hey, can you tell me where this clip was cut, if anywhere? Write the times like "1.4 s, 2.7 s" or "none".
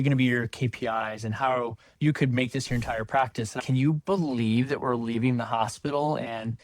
3.6 s